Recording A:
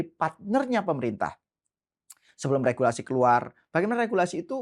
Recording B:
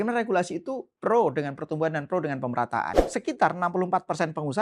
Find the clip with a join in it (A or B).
B